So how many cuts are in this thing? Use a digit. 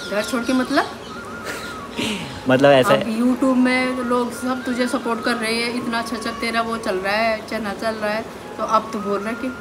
0